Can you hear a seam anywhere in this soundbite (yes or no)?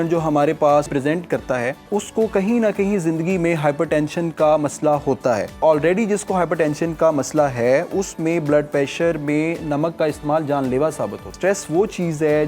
yes